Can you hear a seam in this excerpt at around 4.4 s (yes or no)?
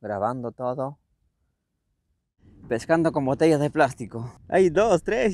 yes